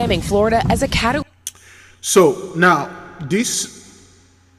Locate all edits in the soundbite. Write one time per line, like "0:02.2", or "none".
none